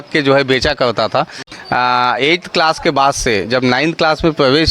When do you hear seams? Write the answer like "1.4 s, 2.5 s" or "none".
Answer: 1.4 s

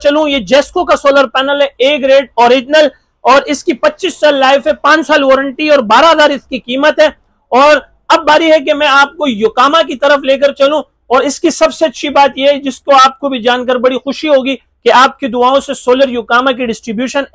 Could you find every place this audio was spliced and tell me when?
none

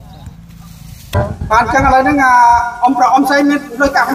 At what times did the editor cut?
1.2 s

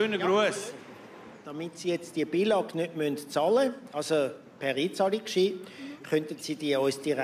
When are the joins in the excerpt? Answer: none

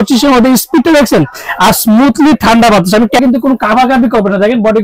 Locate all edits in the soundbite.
3.2 s

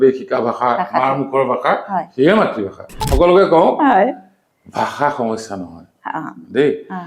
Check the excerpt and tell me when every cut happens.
3.0 s

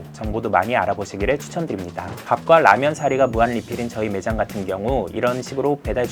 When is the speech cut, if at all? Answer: 2.2 s

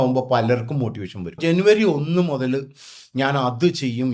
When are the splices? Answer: 1.4 s

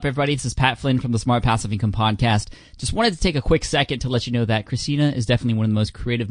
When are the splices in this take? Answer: none

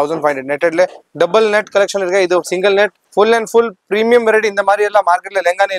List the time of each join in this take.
3.0 s

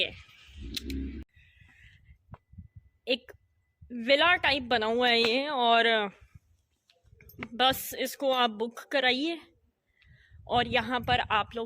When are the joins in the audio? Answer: 1.2 s

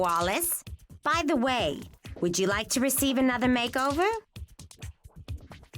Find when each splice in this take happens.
4.2 s

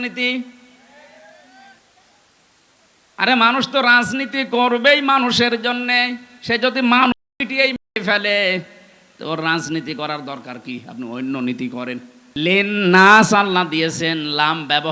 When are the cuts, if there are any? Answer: 12.2 s

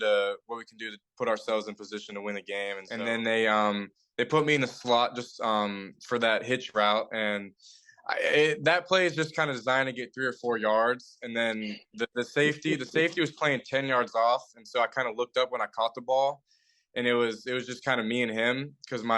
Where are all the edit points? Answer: 2.9 s

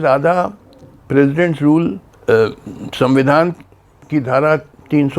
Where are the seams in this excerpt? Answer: 2.1 s

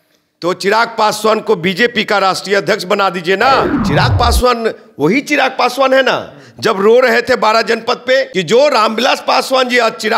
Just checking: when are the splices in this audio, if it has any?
3.8 s, 8.3 s

